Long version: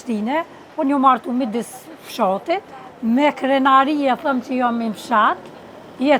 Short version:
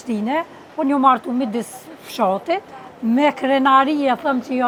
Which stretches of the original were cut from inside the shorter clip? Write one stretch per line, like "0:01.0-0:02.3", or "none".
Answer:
none

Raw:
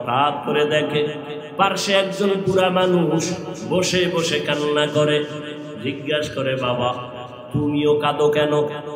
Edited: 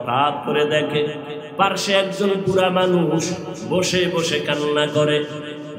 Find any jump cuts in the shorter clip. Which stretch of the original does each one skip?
none

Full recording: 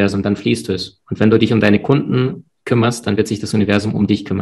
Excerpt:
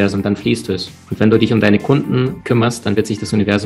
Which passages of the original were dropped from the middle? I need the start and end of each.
0:02.4-0:02.6

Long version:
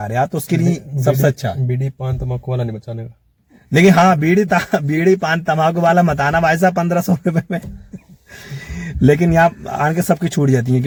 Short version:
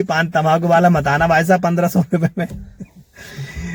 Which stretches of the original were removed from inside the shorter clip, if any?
none

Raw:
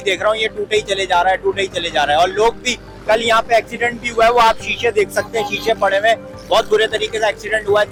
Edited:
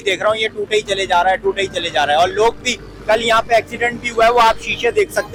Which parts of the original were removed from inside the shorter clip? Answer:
none

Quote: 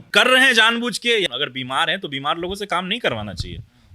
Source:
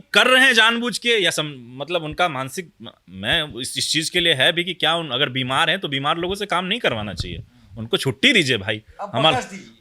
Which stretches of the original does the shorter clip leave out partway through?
0:01.3-0:05.1

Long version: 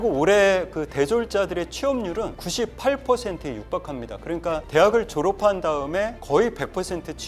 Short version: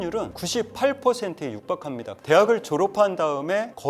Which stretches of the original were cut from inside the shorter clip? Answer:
0:04.2-0:04.6

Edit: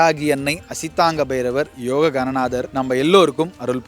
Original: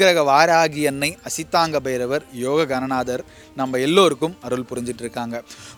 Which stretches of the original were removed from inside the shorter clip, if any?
0:03.2-0:03.5

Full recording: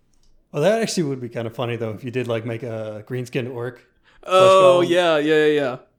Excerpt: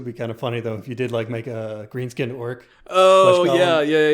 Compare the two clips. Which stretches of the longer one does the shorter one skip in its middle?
0:03.9-0:04.1

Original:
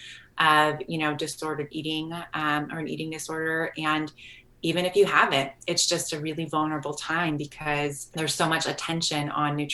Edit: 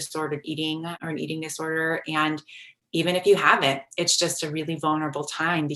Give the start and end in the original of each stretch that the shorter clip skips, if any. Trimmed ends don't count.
0:02.3-0:02.7

